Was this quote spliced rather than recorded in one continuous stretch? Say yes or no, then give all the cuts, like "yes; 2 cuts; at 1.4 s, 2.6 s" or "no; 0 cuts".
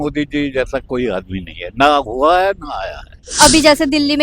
yes; 1 cut; at 3.2 s